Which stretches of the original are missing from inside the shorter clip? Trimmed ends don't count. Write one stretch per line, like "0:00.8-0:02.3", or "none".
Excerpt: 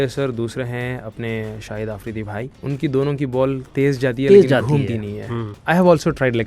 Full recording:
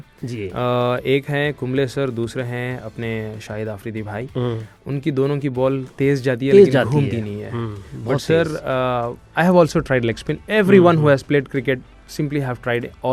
0:04.3-0:04.7
0:07.7-0:09.2